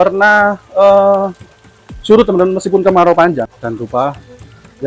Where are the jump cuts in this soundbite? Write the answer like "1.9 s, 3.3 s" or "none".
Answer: 3.5 s